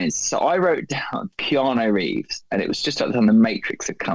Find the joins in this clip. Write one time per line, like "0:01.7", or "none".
0:01.4